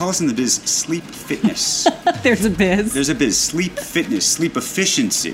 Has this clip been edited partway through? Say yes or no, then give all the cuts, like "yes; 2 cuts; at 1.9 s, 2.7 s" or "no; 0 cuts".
no; 0 cuts